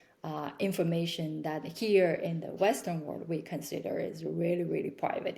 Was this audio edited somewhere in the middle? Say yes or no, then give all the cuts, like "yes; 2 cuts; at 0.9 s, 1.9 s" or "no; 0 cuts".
no; 0 cuts